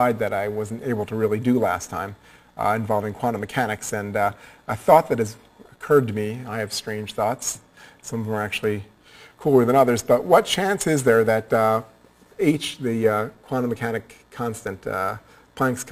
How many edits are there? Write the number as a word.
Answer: zero